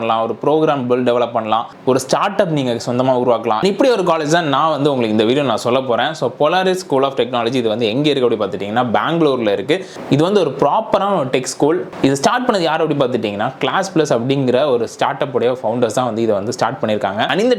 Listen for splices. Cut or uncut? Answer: uncut